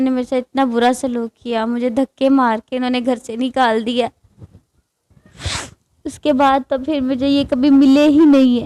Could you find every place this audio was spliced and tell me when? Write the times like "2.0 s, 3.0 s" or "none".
none